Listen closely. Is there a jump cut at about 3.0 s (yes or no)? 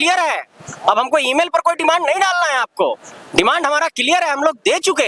no